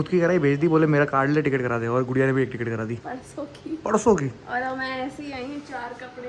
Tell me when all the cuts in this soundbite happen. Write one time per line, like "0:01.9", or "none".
0:03.0

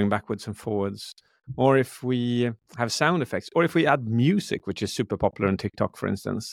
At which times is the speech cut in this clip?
none

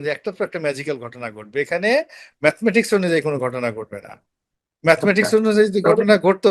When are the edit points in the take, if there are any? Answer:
none

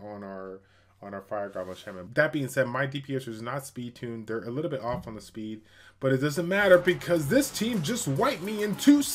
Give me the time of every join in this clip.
0:02.0

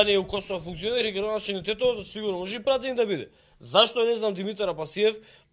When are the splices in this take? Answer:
none

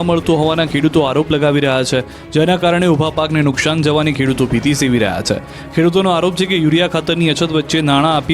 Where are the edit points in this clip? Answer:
0:03.3

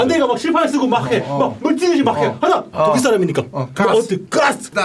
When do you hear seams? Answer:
0:02.7

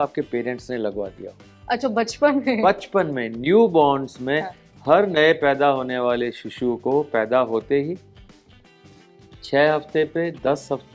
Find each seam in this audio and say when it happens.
none

